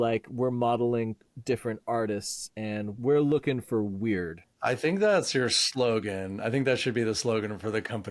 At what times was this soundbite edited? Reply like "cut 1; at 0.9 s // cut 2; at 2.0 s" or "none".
cut 1; at 1.3 s // cut 2; at 2.9 s // cut 3; at 4.6 s

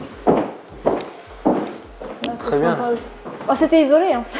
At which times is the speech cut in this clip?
none

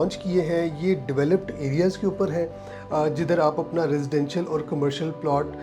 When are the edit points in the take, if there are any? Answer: none

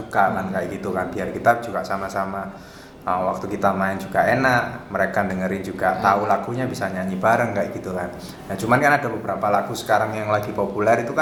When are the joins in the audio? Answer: none

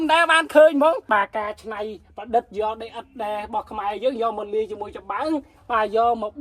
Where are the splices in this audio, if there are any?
cut 1; at 1.0 s

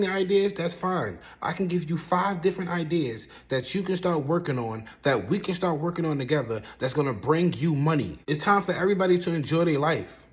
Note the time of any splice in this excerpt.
cut 1; at 8.2 s

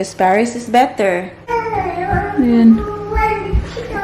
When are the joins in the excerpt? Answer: cut 1; at 1.5 s

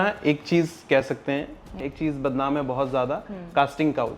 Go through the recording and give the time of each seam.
cut 1; at 1.7 s

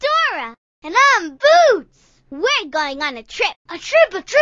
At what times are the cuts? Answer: none

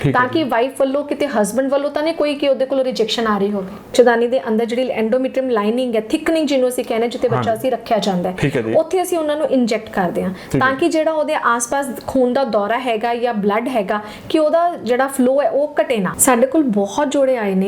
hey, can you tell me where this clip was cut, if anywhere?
cut 1; at 3.9 s // cut 2; at 16.1 s

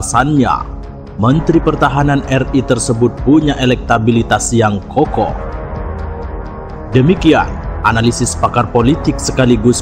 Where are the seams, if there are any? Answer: cut 1; at 5.3 s // cut 2; at 6.7 s

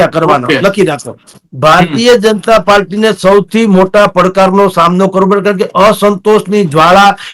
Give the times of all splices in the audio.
cut 1; at 1.3 s

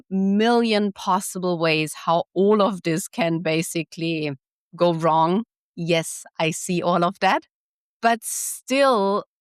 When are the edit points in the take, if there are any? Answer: cut 1; at 7.9 s

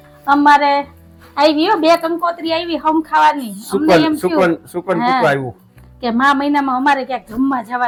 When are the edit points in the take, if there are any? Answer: none

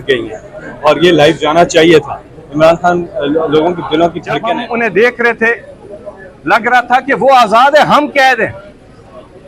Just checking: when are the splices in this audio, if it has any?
cut 1; at 4.6 s

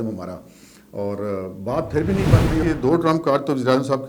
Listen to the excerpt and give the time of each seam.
cut 1; at 2.6 s

